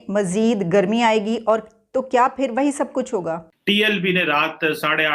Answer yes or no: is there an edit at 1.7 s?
no